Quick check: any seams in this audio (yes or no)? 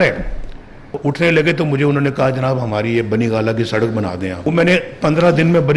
yes